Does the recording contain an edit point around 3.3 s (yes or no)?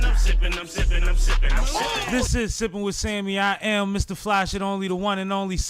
no